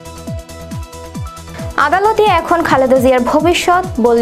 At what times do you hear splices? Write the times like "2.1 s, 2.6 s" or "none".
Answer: none